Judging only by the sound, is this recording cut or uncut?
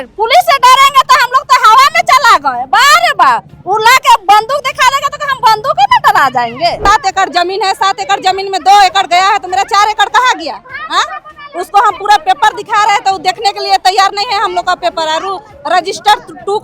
cut